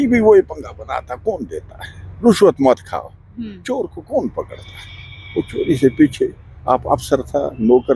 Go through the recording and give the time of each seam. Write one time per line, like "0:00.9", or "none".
none

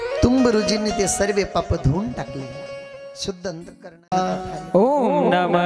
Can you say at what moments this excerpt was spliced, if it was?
0:04.1

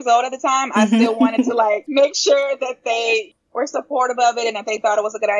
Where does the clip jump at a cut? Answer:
0:01.8
0:03.3

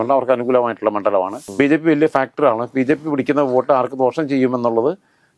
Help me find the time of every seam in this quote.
0:01.4

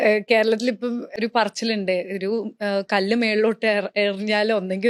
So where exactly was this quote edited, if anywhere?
0:01.2

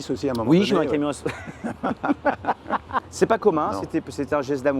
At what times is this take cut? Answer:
0:03.1

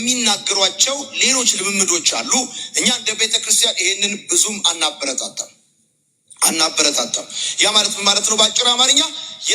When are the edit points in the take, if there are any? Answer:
none

